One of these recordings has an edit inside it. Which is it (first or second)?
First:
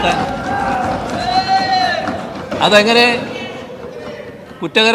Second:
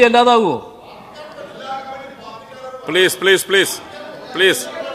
first